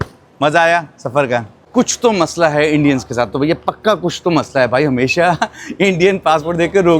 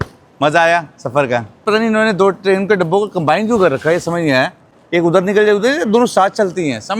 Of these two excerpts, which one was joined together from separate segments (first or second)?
first